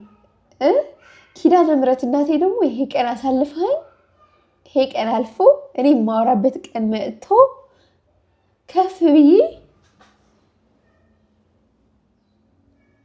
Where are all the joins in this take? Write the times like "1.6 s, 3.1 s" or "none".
none